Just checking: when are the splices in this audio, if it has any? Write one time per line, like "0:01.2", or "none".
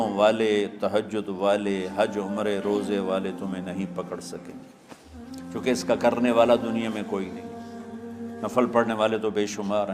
none

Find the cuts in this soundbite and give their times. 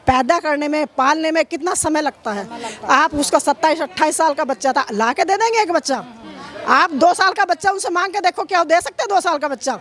none

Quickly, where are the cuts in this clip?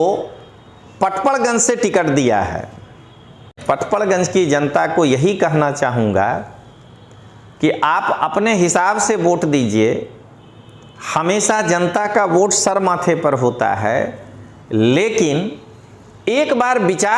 0:03.6

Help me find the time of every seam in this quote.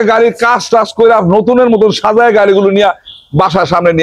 none

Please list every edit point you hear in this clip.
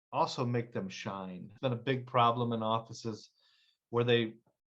0:01.5

